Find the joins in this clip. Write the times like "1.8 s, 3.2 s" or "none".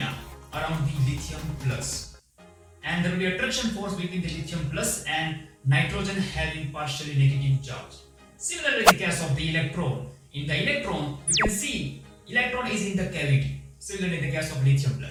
none

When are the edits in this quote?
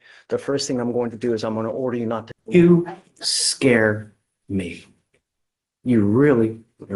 2.3 s

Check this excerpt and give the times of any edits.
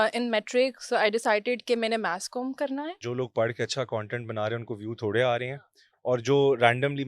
3.0 s

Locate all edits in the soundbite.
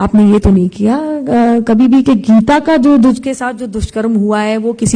none

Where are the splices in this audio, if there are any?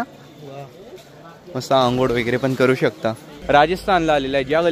3.4 s

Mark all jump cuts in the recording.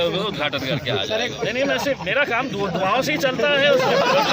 1.3 s

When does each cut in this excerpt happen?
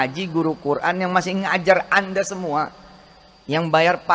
none

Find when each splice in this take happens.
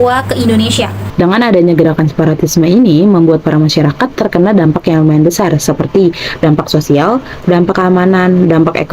1.0 s

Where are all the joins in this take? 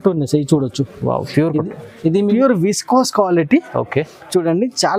2.3 s

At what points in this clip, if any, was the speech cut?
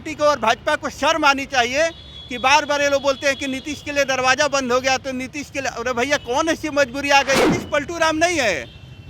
7.4 s

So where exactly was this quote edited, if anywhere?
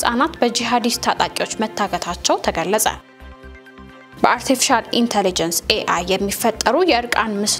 none

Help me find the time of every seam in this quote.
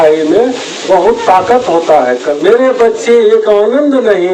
2.3 s

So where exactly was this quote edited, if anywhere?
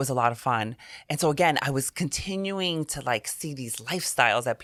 none

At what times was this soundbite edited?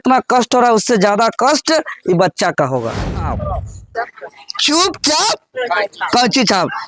3.4 s

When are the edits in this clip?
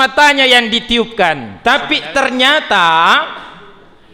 1.5 s

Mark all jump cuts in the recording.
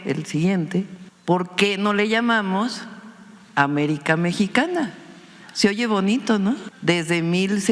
1.0 s, 6.7 s

